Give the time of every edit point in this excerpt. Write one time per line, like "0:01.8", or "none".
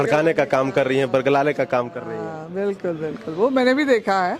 none